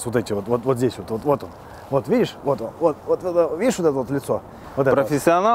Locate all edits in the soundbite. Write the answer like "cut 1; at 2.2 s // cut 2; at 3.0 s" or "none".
none